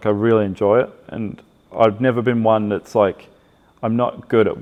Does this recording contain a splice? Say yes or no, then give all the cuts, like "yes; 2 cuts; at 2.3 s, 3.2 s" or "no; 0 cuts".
no; 0 cuts